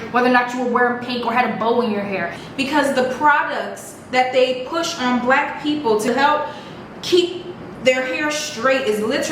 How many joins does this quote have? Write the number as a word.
two